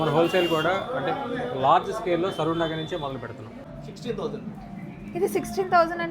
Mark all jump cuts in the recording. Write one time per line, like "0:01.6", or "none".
0:03.6

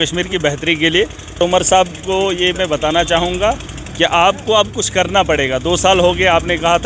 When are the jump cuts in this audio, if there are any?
0:01.4

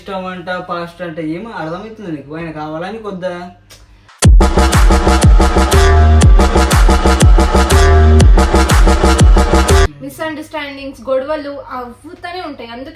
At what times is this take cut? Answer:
0:09.9

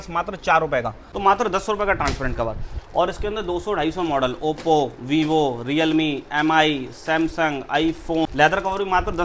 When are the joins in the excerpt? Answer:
0:01.0
0:08.3

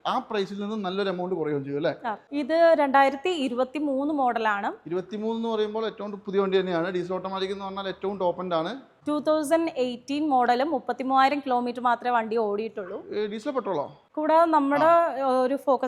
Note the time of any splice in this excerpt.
0:02.2
0:08.9
0:14.0

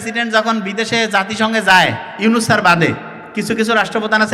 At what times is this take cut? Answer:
0:03.2

